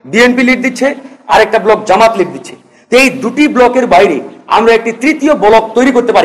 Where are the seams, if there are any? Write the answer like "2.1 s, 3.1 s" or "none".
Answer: none

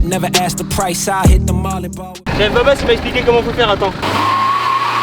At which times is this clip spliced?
2.1 s, 4.0 s

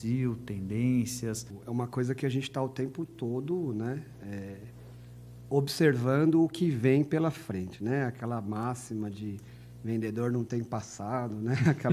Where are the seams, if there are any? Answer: 1.5 s

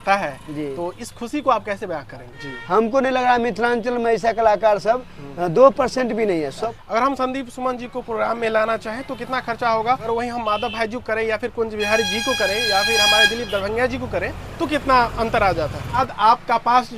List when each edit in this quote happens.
2.2 s, 6.6 s, 10.1 s, 16.0 s

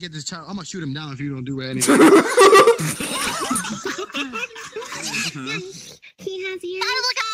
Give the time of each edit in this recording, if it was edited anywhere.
5.1 s

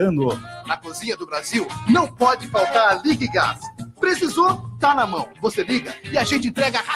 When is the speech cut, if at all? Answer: 2.1 s

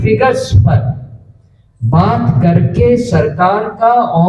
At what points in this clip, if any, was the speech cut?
none

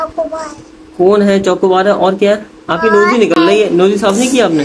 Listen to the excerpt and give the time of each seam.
none

